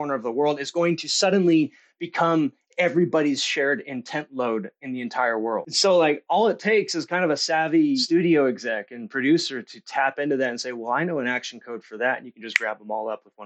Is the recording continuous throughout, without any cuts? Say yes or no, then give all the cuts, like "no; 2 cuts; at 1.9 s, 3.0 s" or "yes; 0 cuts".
no; 2 cuts; at 5.7 s, 8.0 s